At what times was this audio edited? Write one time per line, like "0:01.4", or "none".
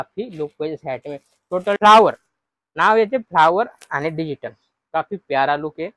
0:01.8